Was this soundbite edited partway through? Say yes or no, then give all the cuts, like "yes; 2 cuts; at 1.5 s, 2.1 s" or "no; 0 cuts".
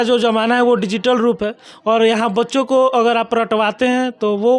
no; 0 cuts